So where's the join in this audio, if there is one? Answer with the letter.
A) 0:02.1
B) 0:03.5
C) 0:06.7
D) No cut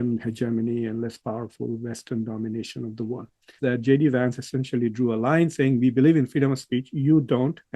B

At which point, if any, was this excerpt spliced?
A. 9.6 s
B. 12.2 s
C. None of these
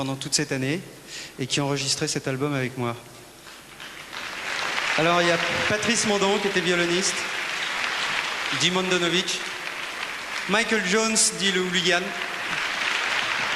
B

